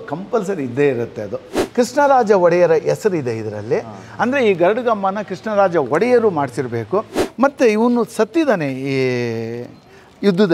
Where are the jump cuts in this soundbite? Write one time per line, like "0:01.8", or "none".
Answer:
0:01.6
0:07.2